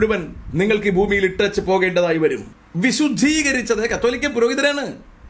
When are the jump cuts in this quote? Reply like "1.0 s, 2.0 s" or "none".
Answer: 2.5 s